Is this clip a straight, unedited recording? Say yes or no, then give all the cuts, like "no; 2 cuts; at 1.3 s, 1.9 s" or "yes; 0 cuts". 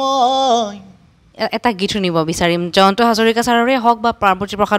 no; 1 cut; at 1.2 s